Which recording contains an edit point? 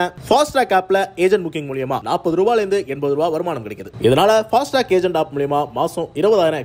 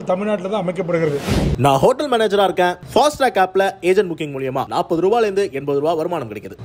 second; 1 cut; at 1.4 s

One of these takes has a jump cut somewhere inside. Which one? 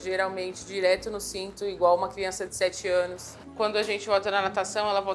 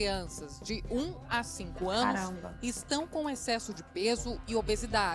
first; 1 cut; at 3.3 s

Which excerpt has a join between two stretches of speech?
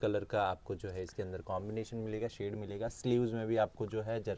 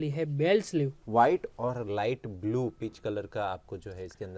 second; 1 cut; at 1.0 s

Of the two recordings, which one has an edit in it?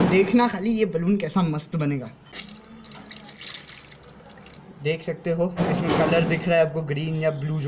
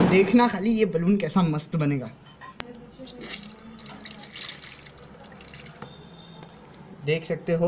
first; 2 cuts; at 2.4 s, 4.5 s

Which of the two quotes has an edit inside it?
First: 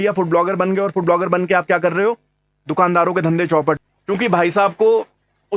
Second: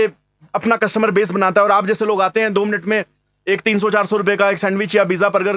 first; 1 cut; at 3.8 s

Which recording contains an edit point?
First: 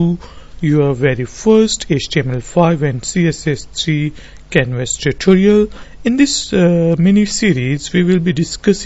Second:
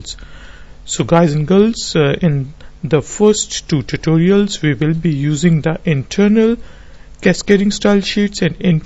second; 1 cut; at 3.9 s

